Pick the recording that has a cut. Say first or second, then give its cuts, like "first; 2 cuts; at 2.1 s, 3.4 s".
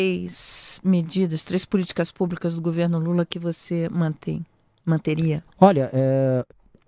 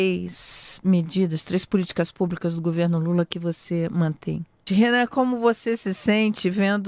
second; 1 cut; at 4.6 s